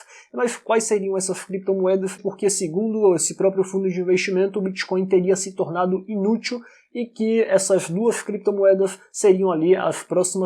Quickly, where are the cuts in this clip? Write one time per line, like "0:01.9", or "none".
0:02.2